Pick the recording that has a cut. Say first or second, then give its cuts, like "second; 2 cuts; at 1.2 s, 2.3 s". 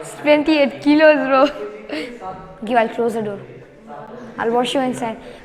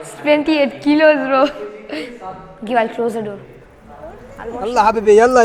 second; 1 cut; at 4.3 s